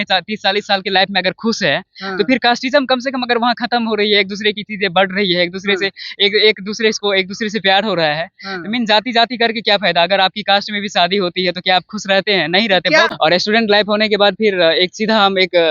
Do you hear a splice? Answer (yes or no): yes